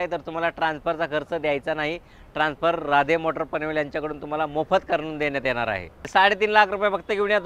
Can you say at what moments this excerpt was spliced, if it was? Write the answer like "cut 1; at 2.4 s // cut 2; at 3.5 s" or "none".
cut 1; at 6.1 s